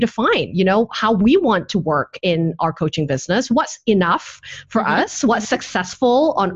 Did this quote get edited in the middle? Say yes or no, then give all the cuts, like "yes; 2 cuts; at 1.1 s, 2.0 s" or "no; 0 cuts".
no; 0 cuts